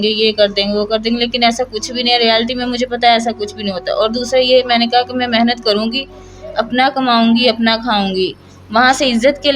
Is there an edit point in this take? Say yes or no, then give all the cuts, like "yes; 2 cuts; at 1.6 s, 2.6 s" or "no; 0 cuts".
no; 0 cuts